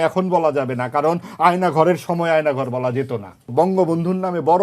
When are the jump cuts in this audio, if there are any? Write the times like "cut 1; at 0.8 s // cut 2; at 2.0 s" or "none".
cut 1; at 3.7 s